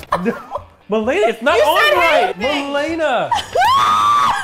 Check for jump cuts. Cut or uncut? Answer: cut